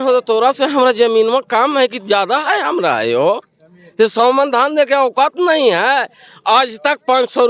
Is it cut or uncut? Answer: uncut